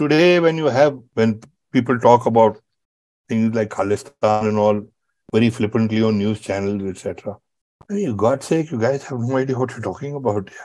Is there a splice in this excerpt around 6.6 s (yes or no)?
no